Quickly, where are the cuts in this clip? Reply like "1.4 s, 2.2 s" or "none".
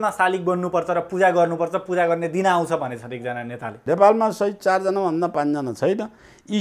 3.7 s

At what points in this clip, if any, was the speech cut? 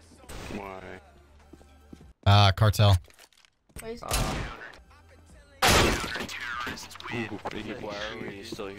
none

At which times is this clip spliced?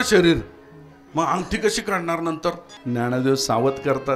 2.7 s

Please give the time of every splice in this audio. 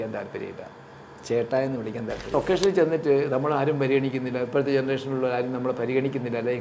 2.3 s

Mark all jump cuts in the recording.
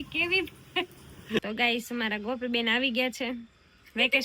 1.4 s

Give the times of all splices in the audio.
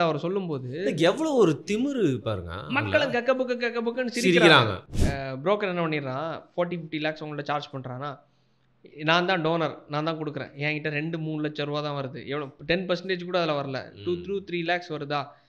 4.8 s

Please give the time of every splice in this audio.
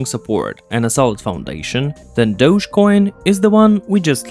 none

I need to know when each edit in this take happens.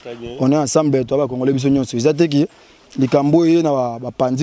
none

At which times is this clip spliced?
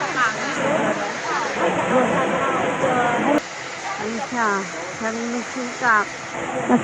3.4 s

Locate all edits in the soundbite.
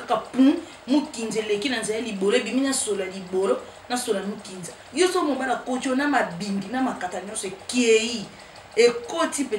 4.8 s

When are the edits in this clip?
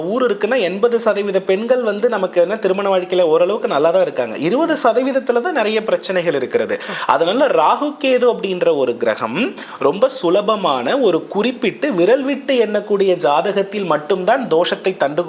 none

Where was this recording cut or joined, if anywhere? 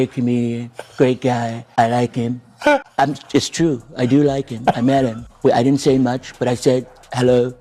1.6 s, 2.9 s, 5.2 s

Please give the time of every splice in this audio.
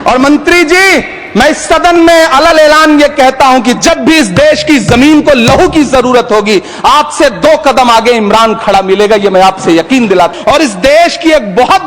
10.3 s

